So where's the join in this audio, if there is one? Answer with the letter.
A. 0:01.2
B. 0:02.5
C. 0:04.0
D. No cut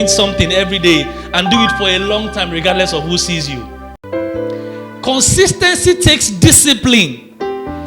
C